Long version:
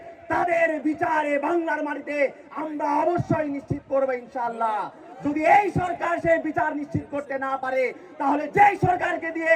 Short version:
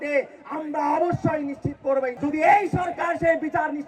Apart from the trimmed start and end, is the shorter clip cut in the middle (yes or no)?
yes